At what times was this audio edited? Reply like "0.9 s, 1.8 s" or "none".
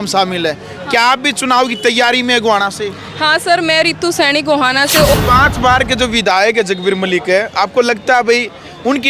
5.1 s